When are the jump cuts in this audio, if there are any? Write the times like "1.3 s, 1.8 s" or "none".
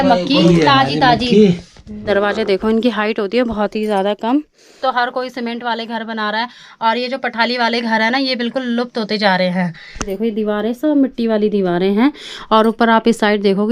2.0 s, 4.6 s, 10.1 s